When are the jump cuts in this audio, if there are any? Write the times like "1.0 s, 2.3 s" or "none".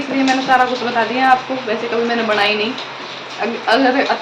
none